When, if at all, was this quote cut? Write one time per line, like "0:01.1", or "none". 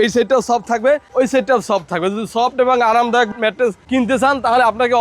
none